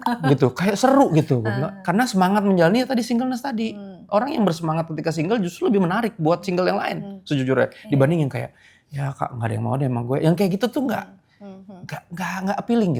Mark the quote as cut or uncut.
uncut